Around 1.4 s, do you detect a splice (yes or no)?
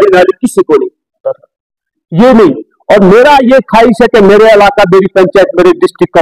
yes